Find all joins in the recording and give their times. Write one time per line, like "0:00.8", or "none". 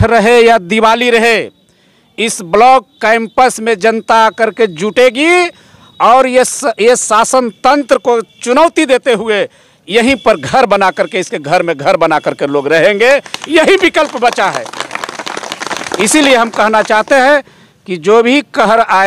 none